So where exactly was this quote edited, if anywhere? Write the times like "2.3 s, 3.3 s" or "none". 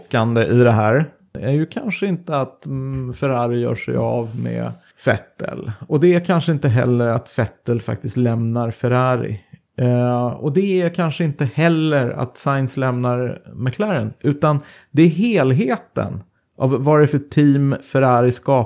1.4 s, 4.8 s